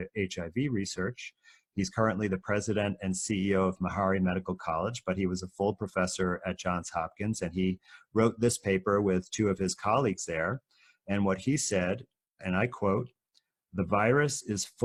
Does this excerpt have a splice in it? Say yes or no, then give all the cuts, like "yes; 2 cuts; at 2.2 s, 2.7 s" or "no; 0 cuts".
no; 0 cuts